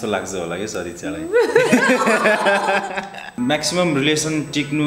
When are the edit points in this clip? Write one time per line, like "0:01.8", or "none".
0:03.3